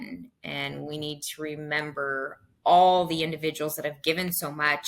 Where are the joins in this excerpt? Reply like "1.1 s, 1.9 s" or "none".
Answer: none